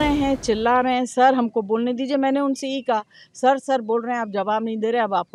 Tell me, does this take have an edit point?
no; 0 cuts

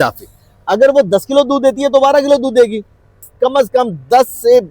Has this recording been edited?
yes; 1 cut; at 3.3 s

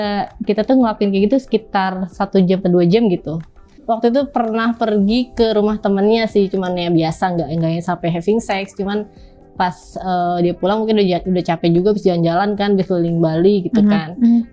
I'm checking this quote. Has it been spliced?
yes; 1 cut; at 3.8 s

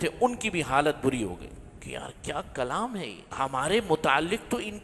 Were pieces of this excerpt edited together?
yes; 1 cut; at 3.3 s

